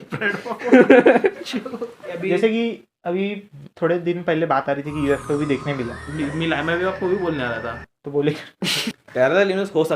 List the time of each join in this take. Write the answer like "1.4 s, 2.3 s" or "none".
2.1 s, 8.8 s